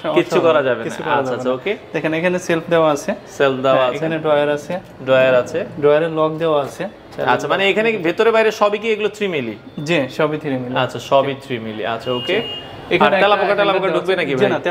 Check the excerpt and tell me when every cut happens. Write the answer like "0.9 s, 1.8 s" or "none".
none